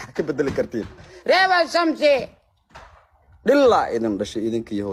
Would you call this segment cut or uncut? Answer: uncut